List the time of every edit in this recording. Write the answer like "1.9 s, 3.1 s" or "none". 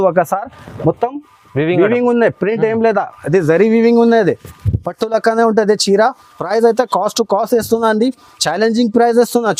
none

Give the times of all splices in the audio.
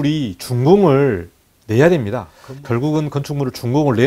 none

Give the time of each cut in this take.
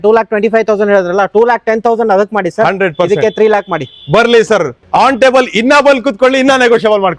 none

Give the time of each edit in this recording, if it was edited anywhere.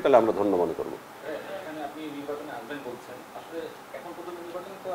none

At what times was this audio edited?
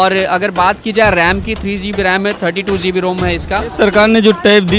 3.7 s

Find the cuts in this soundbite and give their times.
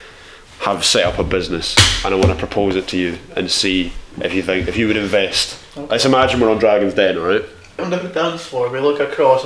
7.8 s

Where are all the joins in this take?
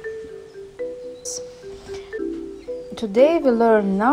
1.0 s

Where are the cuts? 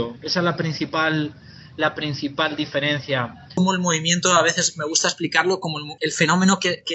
3.6 s, 5.9 s

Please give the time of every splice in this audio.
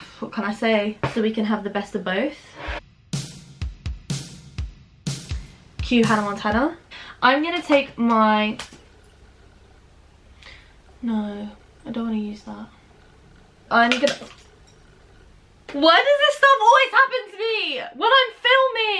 1.0 s, 6.9 s, 13.6 s

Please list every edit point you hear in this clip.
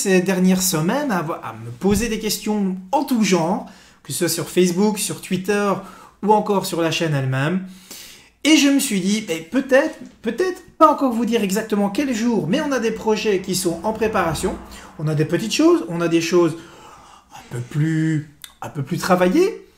none

